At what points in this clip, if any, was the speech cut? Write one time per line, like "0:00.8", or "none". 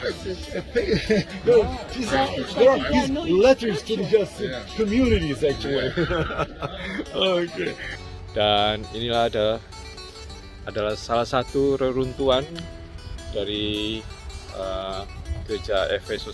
0:07.9